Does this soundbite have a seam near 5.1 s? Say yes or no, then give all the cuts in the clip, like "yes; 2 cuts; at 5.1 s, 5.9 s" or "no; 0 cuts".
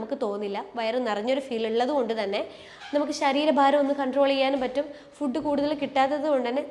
no; 0 cuts